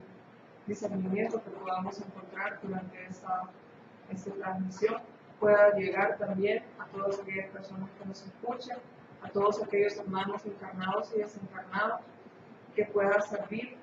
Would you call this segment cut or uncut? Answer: uncut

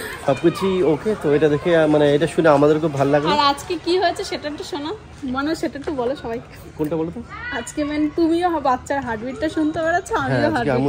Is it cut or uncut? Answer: uncut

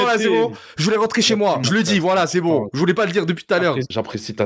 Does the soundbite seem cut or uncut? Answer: cut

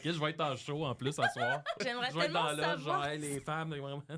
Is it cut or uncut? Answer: cut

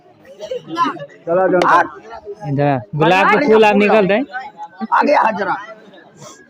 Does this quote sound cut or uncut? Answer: cut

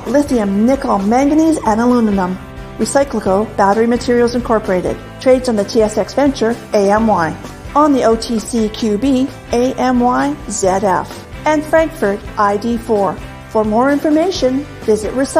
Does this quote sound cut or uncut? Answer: uncut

